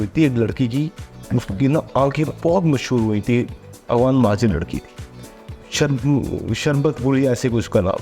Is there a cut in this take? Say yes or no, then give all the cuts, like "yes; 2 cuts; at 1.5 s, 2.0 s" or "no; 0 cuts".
no; 0 cuts